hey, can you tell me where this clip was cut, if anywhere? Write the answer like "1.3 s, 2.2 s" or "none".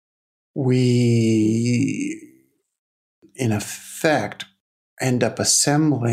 3.2 s